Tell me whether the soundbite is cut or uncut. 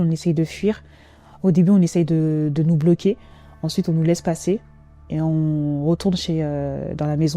uncut